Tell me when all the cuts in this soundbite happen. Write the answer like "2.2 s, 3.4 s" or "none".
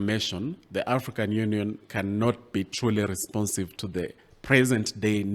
none